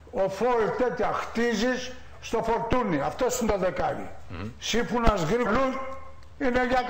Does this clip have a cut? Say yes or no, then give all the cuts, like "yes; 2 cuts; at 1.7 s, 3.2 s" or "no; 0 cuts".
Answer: no; 0 cuts